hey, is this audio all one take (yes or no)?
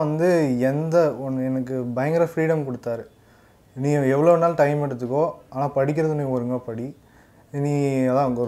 yes